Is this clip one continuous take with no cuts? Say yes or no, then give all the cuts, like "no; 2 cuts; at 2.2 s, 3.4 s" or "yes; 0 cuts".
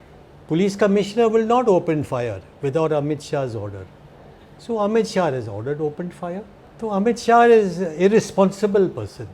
no; 1 cut; at 6.6 s